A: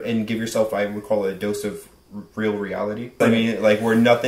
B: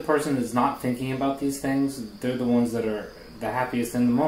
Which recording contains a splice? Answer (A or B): A